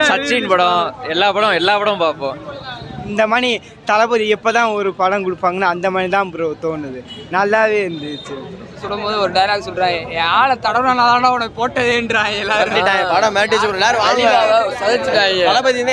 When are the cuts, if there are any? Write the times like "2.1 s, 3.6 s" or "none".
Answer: 3.0 s, 8.8 s